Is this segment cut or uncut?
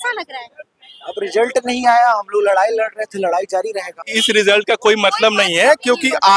cut